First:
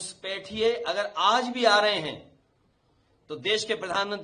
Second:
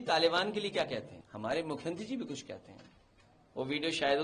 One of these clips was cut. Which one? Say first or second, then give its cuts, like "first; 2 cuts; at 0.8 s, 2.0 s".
second; 1 cut; at 1.2 s